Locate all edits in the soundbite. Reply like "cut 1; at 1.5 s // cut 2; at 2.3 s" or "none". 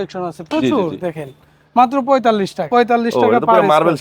cut 1; at 2.6 s